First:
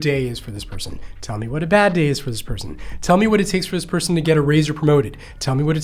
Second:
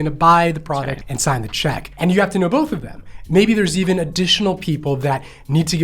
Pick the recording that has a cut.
second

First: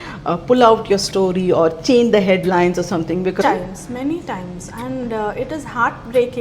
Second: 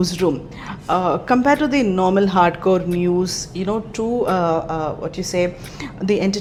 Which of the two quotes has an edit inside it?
first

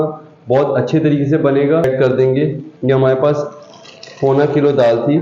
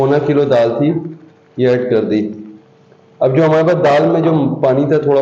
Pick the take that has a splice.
first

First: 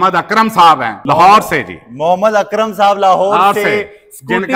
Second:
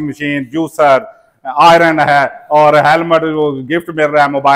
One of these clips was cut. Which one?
first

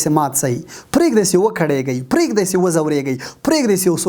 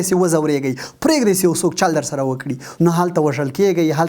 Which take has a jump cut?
second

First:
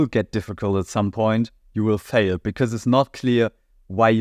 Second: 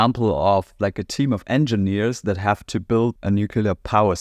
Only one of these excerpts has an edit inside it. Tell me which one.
second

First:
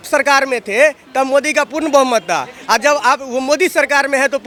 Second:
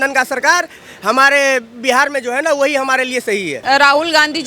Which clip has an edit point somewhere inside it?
second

